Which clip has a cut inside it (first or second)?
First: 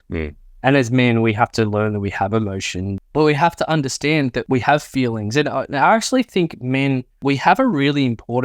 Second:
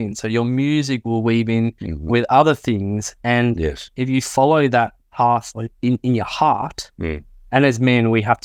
first